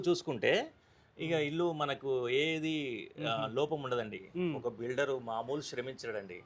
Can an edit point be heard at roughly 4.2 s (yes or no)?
yes